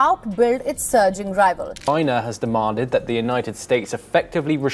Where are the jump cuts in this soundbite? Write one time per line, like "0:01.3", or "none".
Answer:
0:01.7

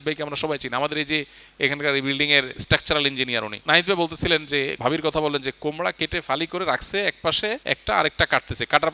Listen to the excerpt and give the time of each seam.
0:03.6
0:04.8
0:07.6

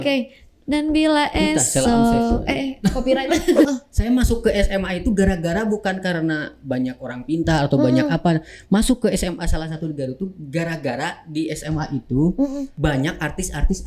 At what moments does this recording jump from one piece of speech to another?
0:03.7
0:12.7

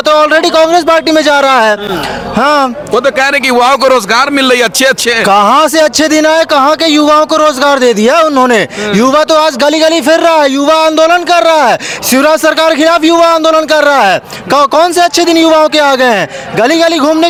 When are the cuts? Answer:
none

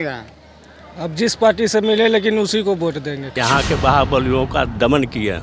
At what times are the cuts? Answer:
0:03.3

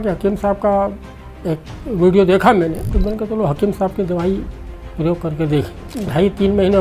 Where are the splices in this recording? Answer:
0:02.9
0:05.8

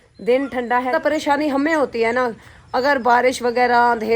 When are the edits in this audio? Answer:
0:00.9

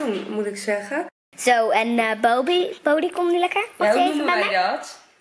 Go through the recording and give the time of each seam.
0:01.2

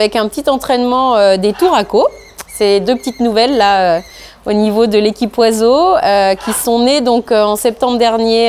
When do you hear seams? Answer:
none

